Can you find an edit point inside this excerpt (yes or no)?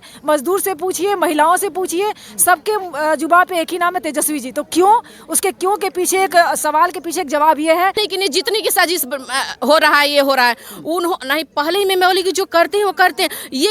yes